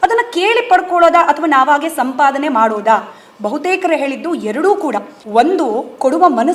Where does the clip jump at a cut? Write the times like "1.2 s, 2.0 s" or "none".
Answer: none

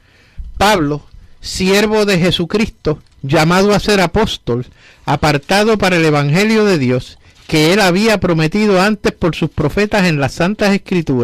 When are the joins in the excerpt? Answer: 3.1 s

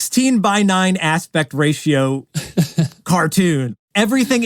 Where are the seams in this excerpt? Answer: none

